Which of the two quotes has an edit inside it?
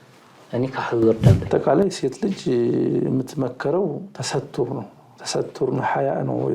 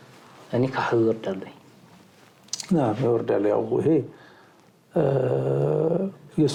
first; 1 cut; at 1.5 s

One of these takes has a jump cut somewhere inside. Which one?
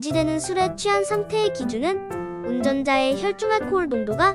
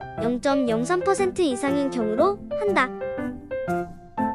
second; 1 cut; at 2.9 s

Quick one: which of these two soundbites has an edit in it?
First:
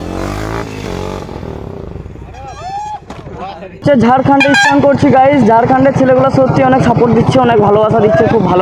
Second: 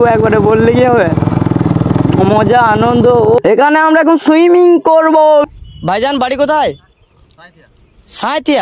second; 2 cuts; at 3.4 s, 5.5 s

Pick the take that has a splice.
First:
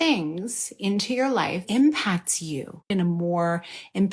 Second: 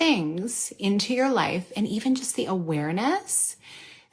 first; 2 cuts; at 1.6 s, 2.9 s

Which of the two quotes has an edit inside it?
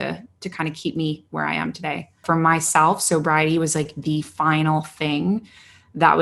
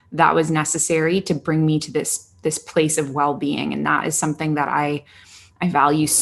first; 1 cut; at 2.2 s

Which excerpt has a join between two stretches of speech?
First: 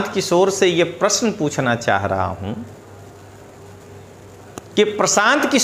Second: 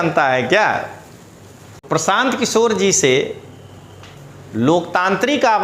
second; 1 cut; at 1.8 s

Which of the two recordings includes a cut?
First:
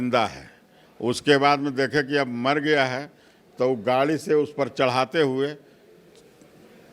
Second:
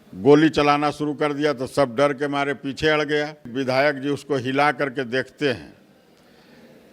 second; 1 cut; at 3.5 s

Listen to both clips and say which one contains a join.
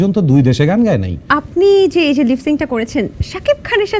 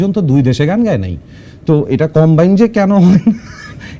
first; 1 cut; at 1.2 s

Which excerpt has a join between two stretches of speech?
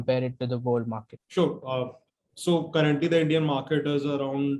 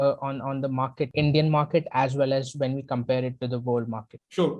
second; 1 cut; at 1.1 s

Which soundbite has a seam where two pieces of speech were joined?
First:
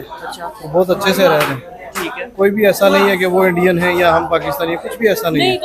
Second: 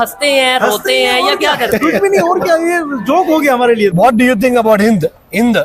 second; 1 cut; at 3.9 s

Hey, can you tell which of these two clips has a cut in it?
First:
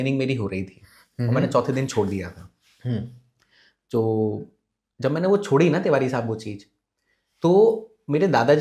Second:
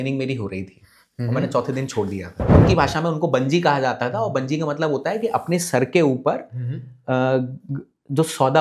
second; 1 cut; at 2.5 s

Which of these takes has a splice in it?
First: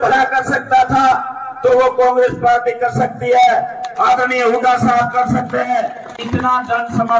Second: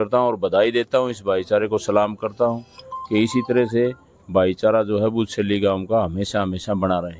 first; 1 cut; at 6.2 s

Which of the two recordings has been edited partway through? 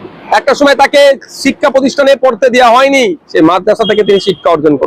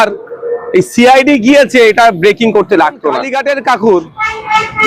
second; 1 cut; at 3.3 s

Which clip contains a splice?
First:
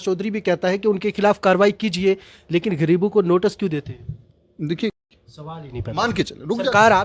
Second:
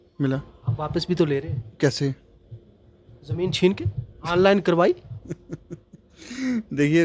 first; 1 cut; at 5.0 s

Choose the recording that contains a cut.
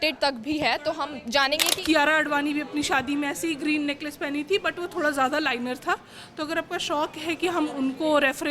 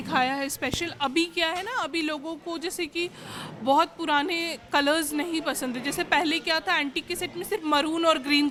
first; 1 cut; at 1.7 s

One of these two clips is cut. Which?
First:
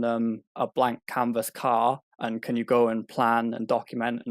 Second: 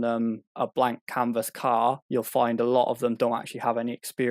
second; 1 cut; at 2.0 s

